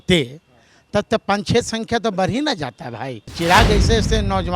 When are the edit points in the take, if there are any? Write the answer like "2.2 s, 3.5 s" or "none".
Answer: 3.2 s